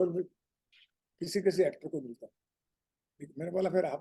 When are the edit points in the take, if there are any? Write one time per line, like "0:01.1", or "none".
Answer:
none